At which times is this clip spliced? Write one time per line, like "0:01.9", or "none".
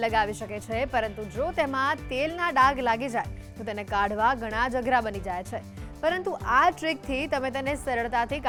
none